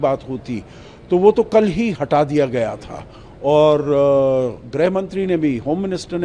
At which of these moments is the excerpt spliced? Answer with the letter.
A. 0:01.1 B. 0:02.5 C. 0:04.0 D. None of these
D